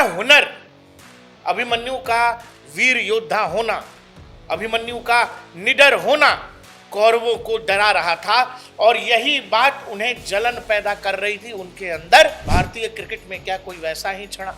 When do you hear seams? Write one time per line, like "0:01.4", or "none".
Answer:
0:12.4